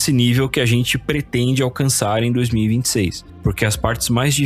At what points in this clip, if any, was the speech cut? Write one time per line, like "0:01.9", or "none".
0:03.4